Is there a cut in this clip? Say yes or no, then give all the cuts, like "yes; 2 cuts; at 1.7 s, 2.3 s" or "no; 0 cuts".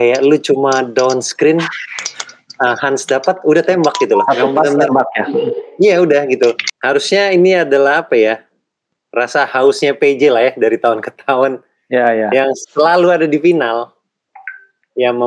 yes; 1 cut; at 6.7 s